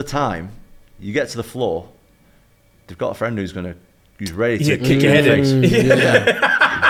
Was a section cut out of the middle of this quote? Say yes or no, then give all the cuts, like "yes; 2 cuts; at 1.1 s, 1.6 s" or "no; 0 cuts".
no; 0 cuts